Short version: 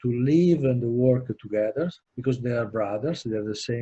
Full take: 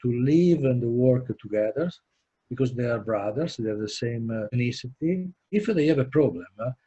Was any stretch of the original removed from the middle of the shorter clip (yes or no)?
yes